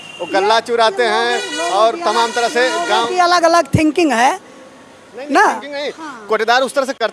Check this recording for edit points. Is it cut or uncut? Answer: uncut